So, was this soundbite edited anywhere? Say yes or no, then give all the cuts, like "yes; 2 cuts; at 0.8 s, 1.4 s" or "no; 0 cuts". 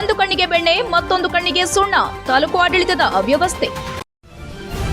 yes; 1 cut; at 3.9 s